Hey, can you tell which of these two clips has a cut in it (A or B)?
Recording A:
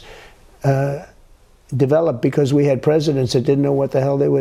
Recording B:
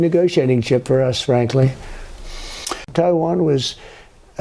B